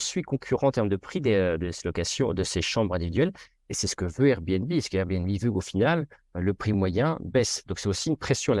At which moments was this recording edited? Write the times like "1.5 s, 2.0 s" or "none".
none